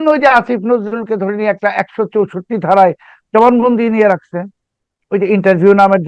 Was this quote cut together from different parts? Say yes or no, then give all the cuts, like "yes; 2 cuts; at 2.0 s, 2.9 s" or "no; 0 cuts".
no; 0 cuts